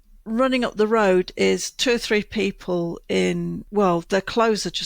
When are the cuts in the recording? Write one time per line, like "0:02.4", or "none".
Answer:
0:03.6